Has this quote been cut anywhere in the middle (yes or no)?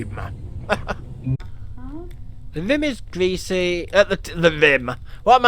yes